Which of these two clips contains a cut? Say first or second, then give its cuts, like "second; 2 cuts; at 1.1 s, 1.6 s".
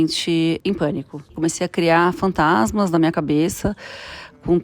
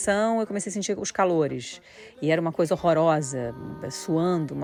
first; 1 cut; at 1.2 s